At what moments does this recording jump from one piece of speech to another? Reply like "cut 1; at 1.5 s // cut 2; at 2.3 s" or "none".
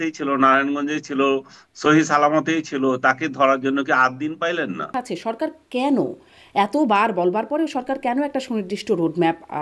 cut 1; at 4.9 s